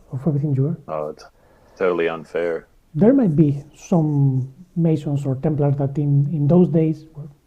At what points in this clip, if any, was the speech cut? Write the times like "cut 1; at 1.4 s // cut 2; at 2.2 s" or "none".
cut 1; at 2.7 s